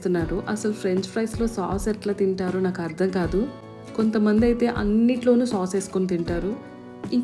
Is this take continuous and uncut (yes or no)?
yes